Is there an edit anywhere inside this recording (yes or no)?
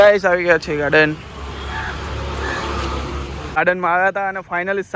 no